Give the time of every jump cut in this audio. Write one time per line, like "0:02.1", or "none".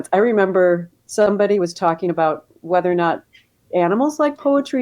0:01.0